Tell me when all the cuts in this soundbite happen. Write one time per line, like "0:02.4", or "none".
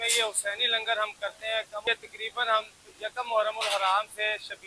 0:01.8